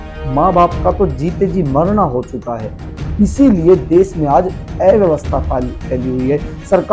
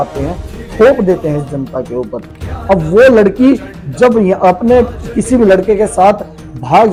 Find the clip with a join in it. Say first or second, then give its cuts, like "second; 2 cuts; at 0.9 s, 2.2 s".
first; 1 cut; at 2.9 s